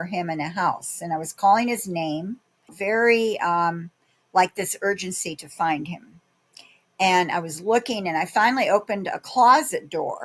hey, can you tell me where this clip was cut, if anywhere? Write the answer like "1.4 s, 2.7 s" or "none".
2.8 s